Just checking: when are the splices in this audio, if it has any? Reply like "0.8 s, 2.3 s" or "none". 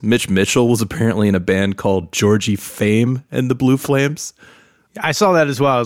4.6 s

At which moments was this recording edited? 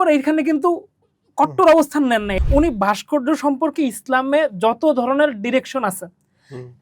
2.4 s

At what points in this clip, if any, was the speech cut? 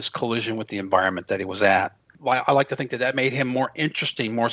2.1 s

